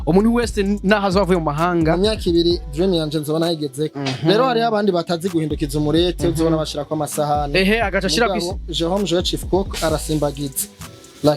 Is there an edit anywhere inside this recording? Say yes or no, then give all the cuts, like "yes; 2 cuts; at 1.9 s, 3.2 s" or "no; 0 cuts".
no; 0 cuts